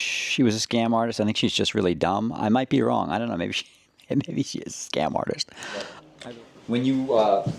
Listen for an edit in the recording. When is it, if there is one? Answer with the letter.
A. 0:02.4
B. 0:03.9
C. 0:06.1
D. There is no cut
C